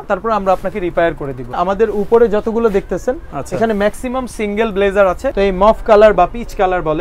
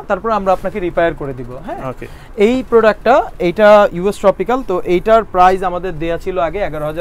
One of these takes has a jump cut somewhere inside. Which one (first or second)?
first